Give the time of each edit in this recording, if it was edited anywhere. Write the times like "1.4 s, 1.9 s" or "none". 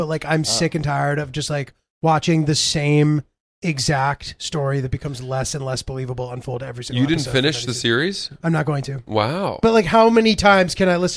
9.6 s